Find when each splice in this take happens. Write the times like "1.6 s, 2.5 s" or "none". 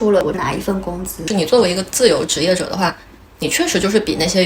1.2 s